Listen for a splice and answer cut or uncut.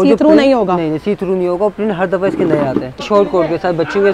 cut